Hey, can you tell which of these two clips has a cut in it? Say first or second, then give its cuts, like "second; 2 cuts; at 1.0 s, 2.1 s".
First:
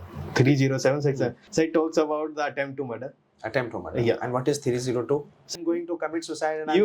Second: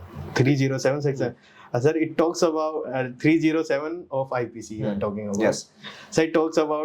first; 2 cuts; at 1.4 s, 5.5 s